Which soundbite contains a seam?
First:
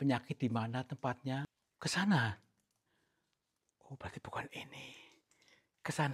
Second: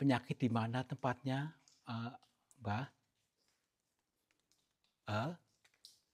first; 1 cut; at 1.6 s

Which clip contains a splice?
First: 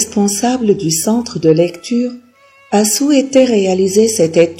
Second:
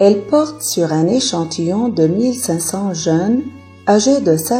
second; 1 cut; at 3.6 s

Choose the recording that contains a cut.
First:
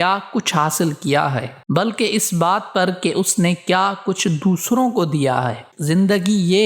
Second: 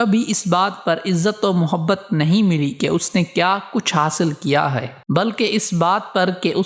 first; 1 cut; at 5.7 s

